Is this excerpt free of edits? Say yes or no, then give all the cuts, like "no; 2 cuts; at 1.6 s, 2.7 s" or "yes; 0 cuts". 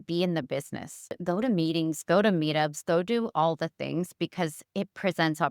no; 1 cut; at 1.2 s